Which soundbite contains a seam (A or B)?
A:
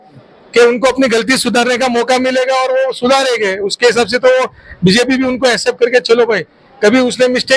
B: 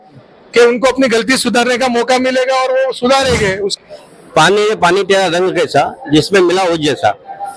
B